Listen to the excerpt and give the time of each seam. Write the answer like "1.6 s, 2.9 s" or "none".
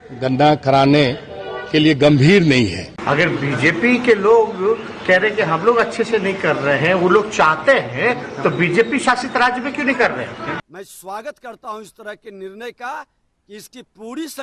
2.9 s, 10.6 s